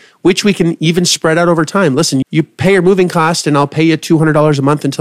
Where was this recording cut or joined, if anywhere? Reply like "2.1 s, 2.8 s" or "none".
2.2 s